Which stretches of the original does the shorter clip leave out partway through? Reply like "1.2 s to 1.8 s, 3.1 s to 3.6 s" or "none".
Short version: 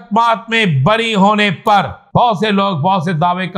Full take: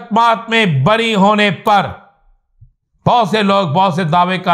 2.0 s to 2.9 s